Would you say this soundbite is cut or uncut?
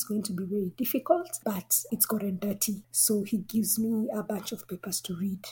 cut